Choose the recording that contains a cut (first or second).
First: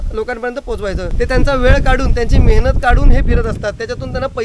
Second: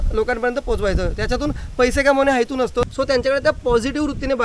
first